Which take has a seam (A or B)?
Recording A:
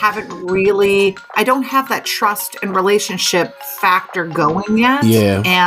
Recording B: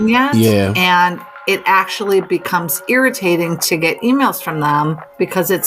A